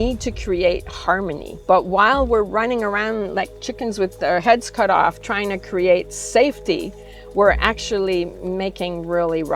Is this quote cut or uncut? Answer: cut